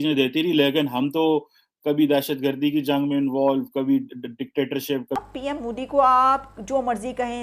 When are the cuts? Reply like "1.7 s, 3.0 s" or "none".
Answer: 5.2 s